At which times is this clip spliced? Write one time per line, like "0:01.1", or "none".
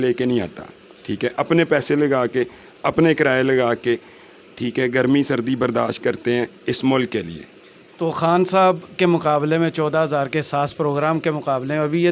none